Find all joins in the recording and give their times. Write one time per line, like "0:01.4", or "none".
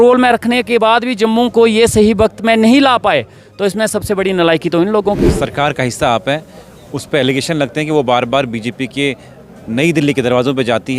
0:05.2